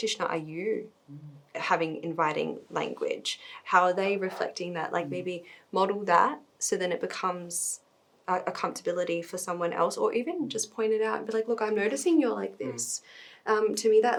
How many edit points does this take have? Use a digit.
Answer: 0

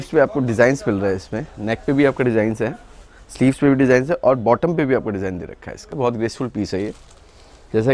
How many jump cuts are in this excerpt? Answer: 1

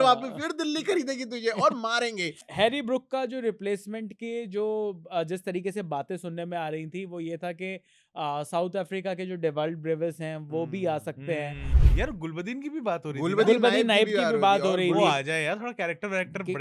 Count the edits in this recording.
2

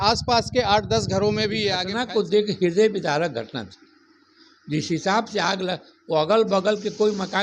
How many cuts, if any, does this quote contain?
1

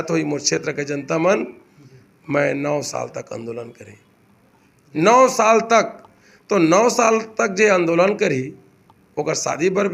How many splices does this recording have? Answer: 0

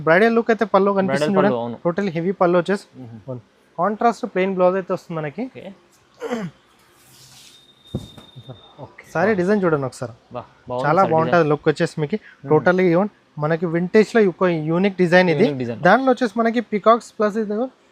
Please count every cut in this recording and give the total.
0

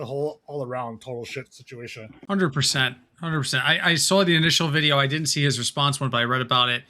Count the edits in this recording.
1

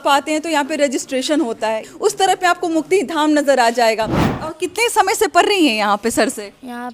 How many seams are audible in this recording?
2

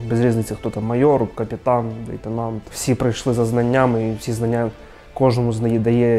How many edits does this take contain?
0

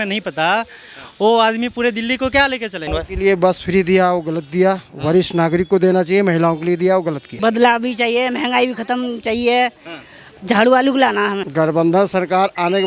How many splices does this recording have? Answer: 3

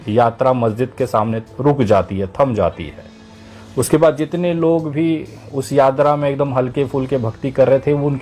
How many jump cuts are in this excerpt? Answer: 0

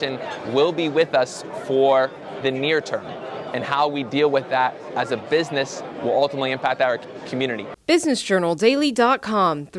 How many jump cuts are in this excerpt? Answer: 1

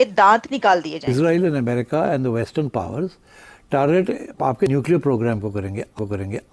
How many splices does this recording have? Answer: 1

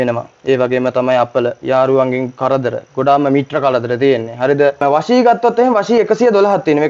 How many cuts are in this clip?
1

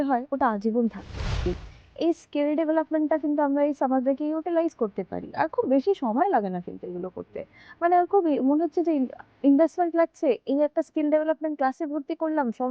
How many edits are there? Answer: 1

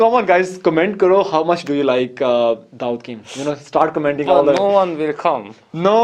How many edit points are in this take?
0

